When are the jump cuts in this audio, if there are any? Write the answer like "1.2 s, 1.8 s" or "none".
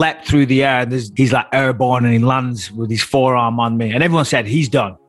1.0 s